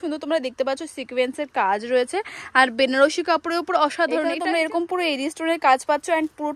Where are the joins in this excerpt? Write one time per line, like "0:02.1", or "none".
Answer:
0:04.3